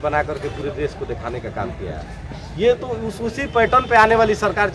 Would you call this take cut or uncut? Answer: uncut